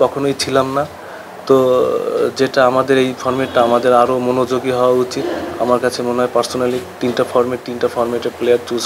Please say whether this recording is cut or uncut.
uncut